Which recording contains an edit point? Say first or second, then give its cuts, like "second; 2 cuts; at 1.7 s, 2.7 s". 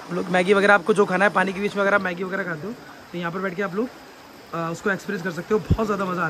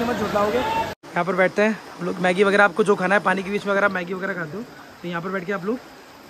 second; 1 cut; at 1.0 s